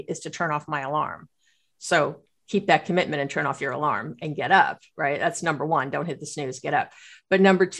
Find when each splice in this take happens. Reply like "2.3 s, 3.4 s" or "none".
2.3 s